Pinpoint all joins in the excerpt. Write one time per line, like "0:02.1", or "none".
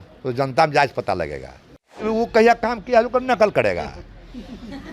0:02.0